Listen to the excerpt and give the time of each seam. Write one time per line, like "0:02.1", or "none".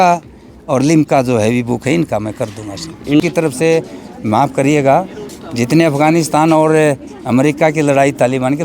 0:03.2